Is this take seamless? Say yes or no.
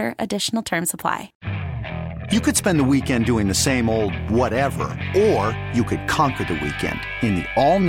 no